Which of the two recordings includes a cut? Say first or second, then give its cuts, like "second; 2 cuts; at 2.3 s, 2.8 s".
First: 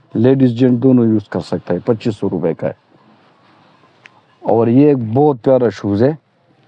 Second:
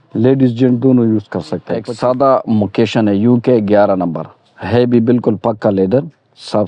second; 1 cut; at 1.9 s